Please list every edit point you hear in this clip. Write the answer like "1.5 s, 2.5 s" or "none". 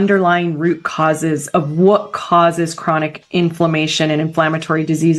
none